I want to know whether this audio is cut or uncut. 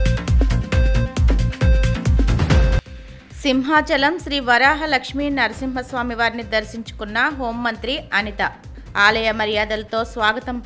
uncut